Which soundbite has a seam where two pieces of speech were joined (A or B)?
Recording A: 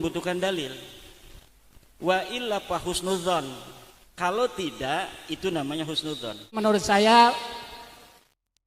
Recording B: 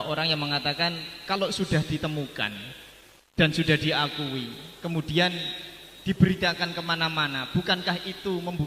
A